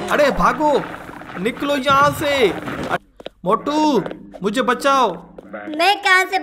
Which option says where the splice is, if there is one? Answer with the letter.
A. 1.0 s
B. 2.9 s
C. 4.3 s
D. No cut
B